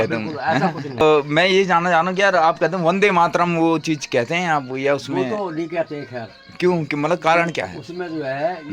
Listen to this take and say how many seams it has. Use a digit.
1